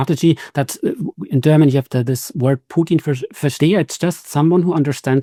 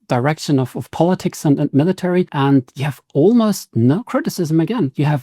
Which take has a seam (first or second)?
second